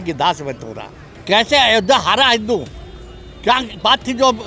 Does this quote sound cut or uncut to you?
cut